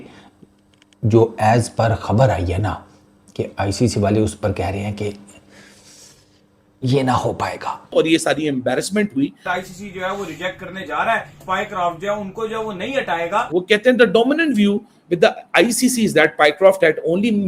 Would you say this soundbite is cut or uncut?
cut